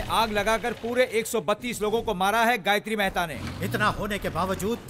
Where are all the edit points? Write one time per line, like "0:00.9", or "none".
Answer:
0:03.3

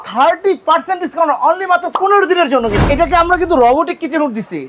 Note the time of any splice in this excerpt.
0:02.8

